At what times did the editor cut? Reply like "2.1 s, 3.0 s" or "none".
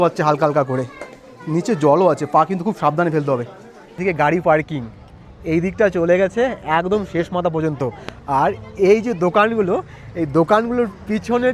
4.0 s

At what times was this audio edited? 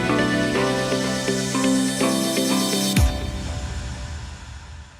1.8 s

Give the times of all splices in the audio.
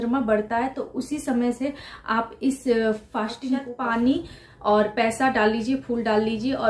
3.7 s

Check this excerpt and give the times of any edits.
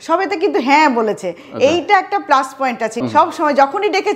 3.0 s

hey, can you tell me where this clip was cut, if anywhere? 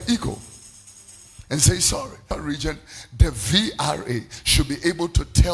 2.4 s

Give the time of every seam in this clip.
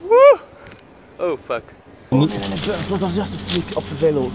2.1 s

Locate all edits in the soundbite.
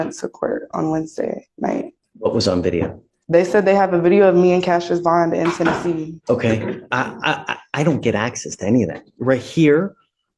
2.0 s, 6.2 s

